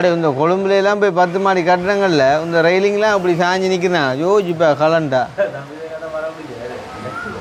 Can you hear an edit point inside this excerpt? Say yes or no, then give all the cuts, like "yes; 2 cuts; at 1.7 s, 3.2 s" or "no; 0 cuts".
no; 0 cuts